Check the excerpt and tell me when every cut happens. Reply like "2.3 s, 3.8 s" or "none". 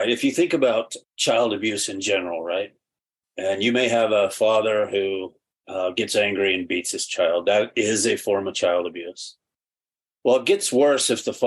0.9 s